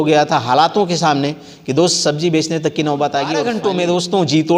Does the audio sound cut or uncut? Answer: cut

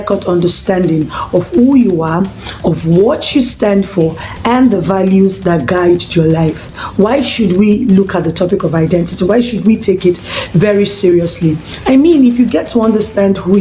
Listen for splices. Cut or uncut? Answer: cut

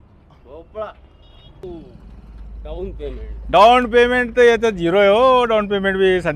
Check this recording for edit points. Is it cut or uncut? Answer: cut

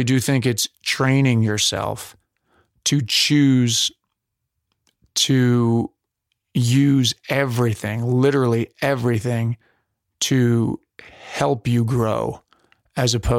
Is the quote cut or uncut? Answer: uncut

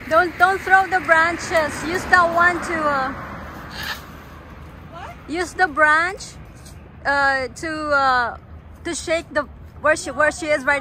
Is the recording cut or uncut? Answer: uncut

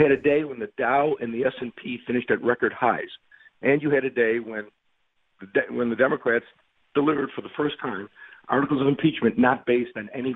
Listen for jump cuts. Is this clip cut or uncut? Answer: uncut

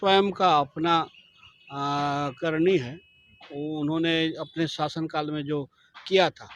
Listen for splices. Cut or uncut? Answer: uncut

